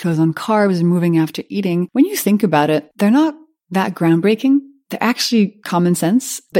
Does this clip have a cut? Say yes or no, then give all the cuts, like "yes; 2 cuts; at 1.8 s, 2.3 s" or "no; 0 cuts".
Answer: yes; 2 cuts; at 1.9 s, 2.9 s